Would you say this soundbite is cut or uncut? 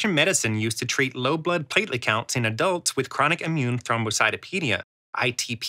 uncut